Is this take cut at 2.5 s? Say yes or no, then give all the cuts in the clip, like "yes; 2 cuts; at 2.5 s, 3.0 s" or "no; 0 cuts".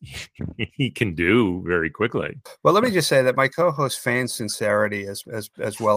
yes; 1 cut; at 2.5 s